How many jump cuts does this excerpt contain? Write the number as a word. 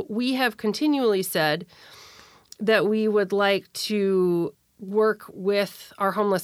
one